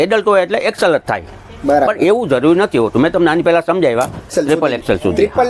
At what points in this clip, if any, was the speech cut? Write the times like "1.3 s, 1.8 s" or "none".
4.3 s